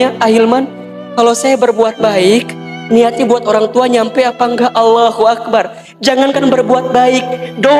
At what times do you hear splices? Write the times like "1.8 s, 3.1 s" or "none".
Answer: none

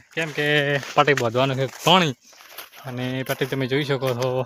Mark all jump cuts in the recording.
none

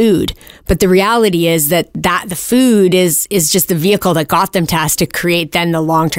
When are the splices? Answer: 5.1 s

